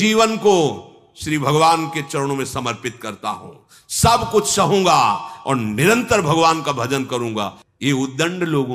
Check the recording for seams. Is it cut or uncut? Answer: cut